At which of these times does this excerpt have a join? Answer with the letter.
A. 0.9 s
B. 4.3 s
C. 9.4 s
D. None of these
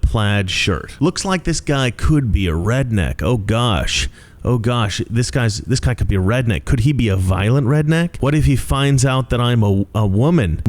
A